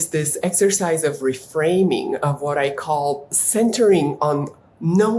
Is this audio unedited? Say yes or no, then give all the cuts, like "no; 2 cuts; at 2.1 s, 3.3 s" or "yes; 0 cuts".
no; 1 cut; at 3.4 s